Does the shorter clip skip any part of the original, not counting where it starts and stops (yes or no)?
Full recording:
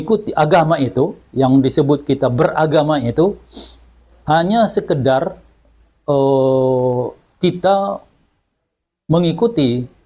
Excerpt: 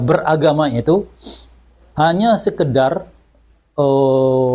no